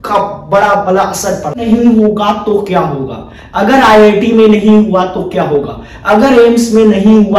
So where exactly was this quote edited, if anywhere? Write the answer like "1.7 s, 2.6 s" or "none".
1.6 s